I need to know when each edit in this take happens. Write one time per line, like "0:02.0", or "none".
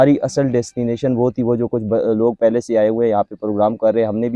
none